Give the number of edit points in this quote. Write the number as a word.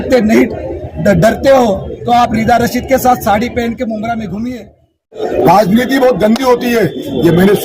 one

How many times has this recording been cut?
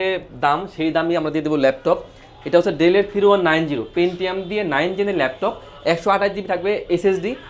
zero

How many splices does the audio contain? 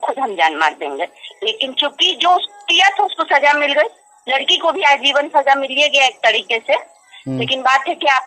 zero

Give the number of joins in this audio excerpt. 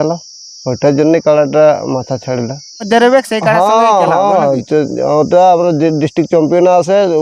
one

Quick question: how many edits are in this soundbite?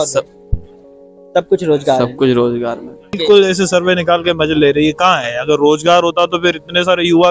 one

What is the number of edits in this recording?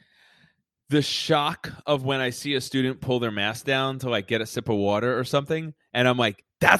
zero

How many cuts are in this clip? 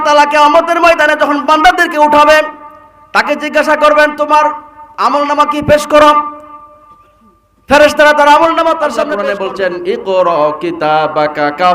one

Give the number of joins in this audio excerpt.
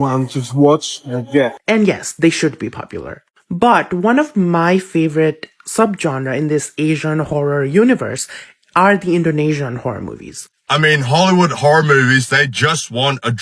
two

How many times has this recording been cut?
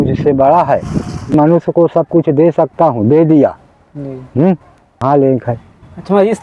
two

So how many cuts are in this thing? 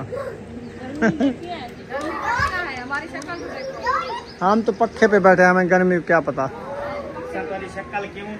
zero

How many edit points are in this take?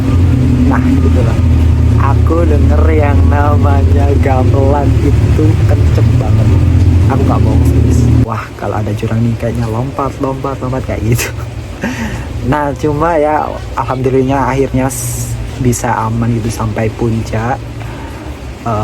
one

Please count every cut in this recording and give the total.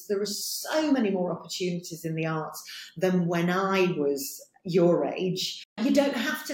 one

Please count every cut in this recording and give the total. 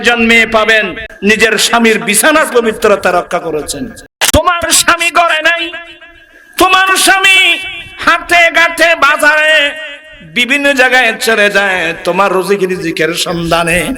one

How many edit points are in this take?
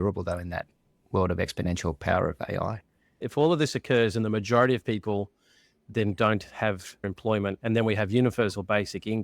two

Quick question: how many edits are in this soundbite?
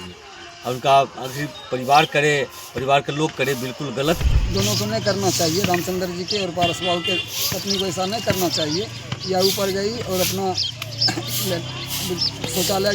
one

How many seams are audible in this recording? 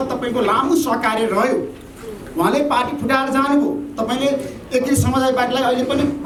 zero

